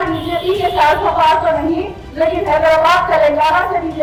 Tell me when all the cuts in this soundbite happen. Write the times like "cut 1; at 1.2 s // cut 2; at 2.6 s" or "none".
none